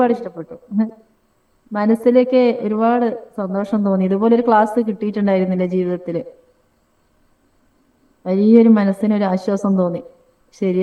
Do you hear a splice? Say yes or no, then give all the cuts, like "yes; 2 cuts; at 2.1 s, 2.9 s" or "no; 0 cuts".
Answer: no; 0 cuts